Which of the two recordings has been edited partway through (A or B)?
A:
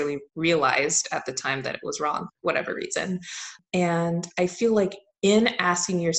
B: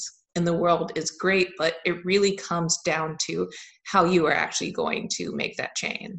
A